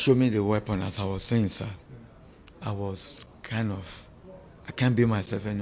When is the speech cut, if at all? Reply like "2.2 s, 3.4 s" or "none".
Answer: none